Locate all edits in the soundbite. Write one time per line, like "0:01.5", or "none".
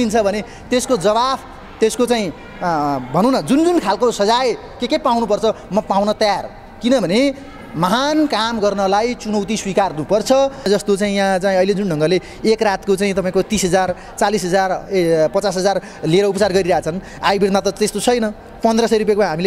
0:10.7